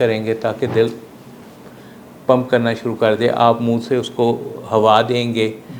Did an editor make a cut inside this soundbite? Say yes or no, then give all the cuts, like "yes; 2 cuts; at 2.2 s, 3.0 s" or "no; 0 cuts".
no; 0 cuts